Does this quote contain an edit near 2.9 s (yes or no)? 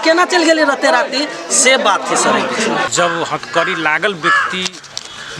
yes